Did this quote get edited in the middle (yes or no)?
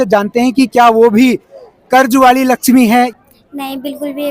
yes